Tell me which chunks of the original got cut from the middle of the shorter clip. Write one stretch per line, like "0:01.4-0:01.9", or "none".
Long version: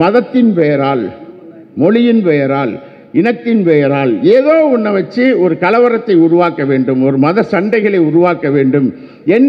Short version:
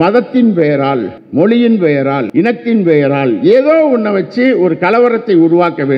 0:01.2-0:01.6
0:02.7-0:03.1